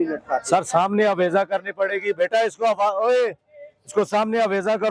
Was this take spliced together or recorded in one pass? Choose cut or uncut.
uncut